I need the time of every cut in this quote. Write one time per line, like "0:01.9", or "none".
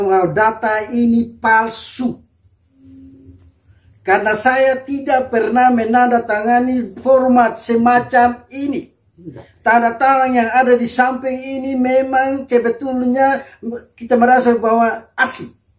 none